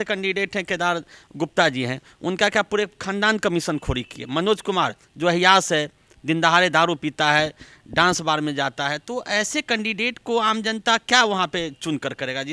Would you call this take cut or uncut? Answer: uncut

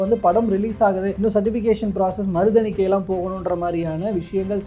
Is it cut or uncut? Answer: cut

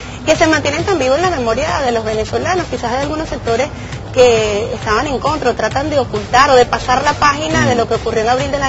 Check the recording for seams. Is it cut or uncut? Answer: uncut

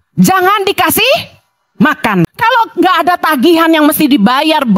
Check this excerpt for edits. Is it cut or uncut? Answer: cut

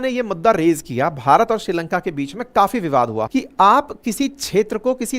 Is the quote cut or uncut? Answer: cut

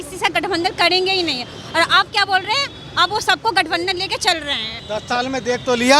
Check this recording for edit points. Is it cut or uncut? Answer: cut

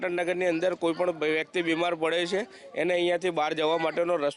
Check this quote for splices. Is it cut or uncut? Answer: uncut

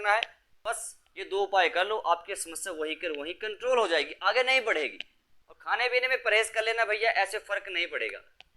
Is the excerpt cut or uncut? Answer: cut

